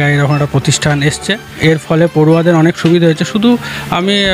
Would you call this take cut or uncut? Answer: cut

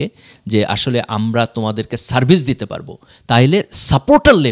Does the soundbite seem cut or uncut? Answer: uncut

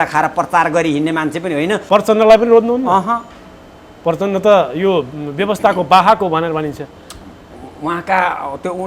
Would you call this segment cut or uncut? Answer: cut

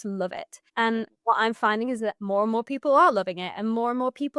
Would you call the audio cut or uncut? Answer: cut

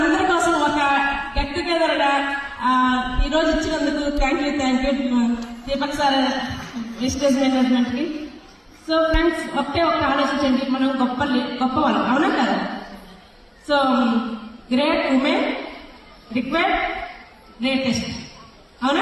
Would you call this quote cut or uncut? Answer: cut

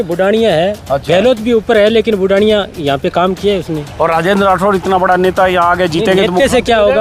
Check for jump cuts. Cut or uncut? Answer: uncut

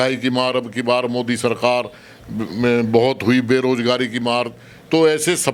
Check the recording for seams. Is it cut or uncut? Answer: uncut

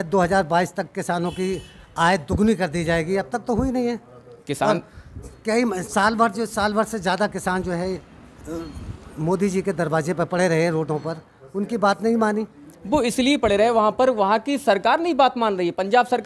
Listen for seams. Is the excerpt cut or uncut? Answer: uncut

